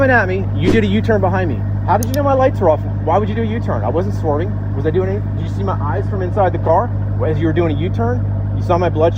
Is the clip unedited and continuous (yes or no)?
yes